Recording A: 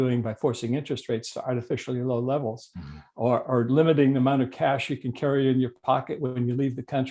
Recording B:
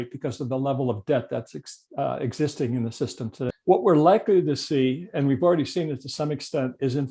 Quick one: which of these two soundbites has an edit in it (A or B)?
B